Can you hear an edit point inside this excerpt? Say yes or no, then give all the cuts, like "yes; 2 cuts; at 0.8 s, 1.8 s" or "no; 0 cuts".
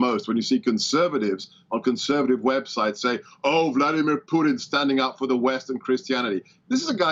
no; 0 cuts